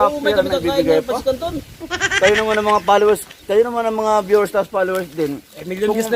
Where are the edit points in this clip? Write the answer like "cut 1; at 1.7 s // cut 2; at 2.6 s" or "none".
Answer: none